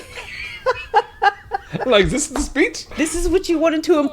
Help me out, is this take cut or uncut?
cut